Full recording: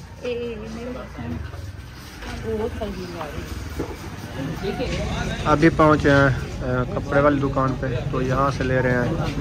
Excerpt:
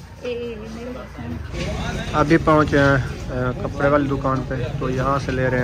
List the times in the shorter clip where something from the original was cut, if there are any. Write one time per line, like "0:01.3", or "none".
0:01.6